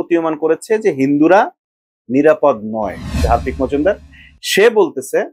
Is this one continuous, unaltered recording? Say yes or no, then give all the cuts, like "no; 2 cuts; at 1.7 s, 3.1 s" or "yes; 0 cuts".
no; 1 cut; at 3.2 s